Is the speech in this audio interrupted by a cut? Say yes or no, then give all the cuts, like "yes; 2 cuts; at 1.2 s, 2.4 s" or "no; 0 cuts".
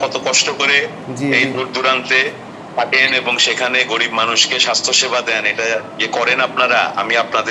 no; 0 cuts